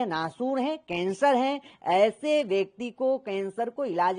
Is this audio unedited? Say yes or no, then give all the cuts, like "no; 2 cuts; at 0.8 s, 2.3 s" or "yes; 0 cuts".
yes; 0 cuts